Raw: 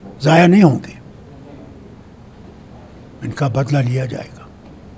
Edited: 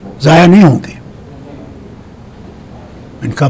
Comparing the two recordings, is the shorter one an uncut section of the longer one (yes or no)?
yes